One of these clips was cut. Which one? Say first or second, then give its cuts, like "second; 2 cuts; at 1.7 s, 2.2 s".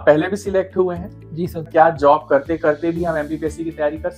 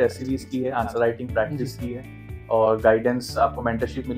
first; 1 cut; at 1.7 s